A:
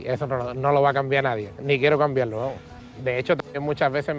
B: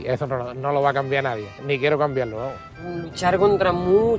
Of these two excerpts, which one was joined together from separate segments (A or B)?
B